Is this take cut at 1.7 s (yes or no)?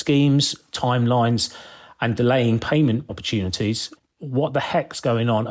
no